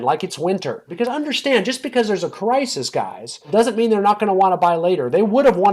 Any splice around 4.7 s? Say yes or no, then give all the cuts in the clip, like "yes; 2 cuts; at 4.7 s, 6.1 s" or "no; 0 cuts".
no; 2 cuts; at 0.9 s, 3.5 s